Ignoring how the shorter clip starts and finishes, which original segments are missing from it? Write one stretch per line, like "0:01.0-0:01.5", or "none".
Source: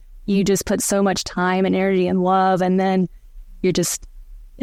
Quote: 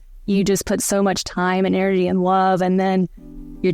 none